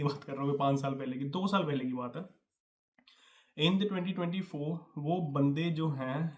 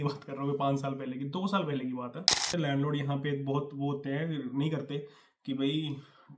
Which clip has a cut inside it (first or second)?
second